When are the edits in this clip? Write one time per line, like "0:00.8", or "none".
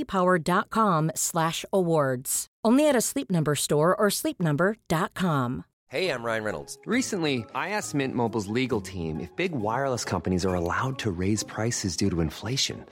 0:05.8